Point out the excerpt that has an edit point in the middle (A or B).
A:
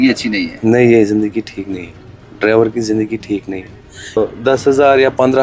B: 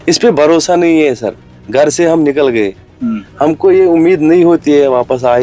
A